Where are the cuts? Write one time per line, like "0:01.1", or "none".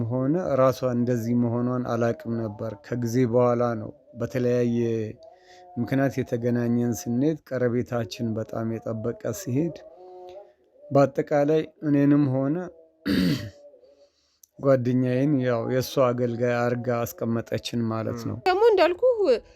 0:18.5